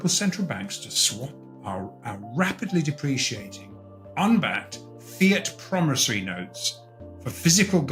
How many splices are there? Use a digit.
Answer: 0